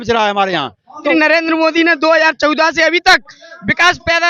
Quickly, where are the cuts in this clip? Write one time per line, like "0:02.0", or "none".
0:01.1